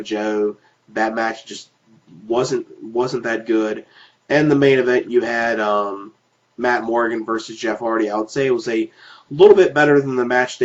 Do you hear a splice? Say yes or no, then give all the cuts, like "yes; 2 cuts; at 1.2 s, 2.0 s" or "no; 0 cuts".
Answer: yes; 1 cut; at 5.6 s